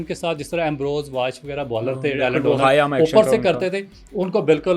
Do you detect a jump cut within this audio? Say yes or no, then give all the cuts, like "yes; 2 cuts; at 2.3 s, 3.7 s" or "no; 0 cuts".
no; 0 cuts